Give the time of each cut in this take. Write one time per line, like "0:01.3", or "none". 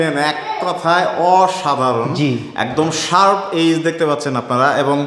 none